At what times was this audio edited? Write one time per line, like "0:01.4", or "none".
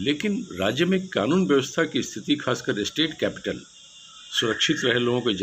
none